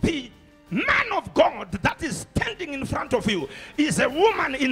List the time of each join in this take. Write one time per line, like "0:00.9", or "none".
none